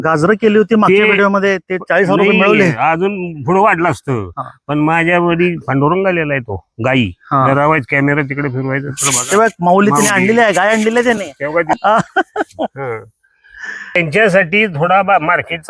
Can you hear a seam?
yes; 2 cuts; at 11.8 s, 14.0 s

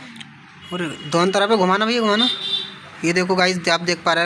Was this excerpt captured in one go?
yes; 0 cuts

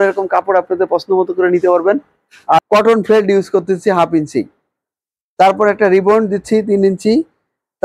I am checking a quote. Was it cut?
yes; 1 cut; at 2.6 s

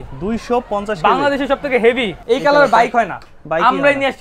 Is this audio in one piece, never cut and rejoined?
no; 1 cut; at 2.1 s

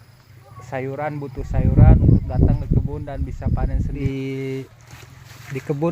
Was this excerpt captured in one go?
no; 1 cut; at 4.0 s

